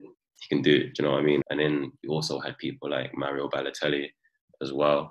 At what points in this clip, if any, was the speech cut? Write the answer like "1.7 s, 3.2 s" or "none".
1.4 s